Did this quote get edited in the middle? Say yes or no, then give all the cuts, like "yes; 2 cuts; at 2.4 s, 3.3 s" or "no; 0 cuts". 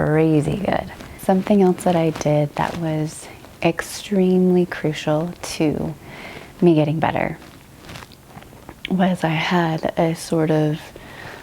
yes; 1 cut; at 1.1 s